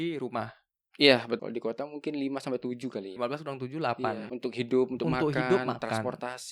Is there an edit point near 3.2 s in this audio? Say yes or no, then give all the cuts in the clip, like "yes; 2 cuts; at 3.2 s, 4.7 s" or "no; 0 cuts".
yes; 3 cuts; at 1.4 s, 3.2 s, 4.3 s